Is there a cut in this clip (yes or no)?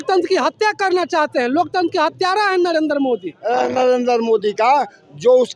yes